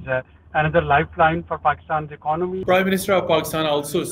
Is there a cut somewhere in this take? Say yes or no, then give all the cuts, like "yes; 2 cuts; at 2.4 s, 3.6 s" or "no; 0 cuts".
yes; 1 cut; at 2.6 s